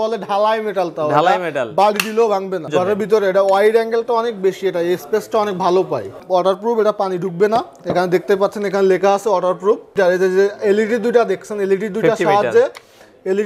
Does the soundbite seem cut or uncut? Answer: cut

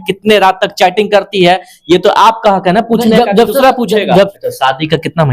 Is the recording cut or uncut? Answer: cut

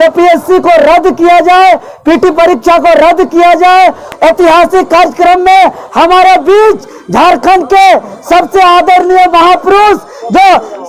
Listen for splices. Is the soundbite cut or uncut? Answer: uncut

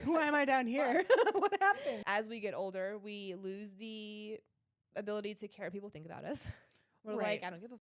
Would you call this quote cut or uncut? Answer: cut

